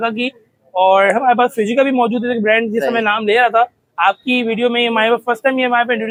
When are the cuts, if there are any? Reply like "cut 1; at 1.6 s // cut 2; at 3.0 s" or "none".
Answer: none